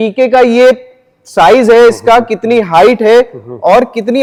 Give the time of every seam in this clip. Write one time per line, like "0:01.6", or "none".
none